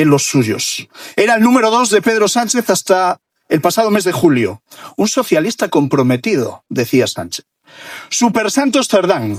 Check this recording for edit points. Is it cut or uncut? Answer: uncut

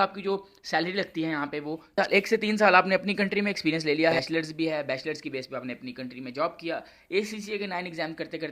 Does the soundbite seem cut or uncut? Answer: cut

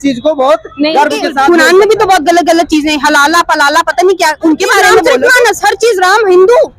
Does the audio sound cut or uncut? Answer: cut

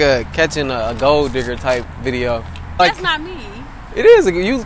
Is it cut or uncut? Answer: cut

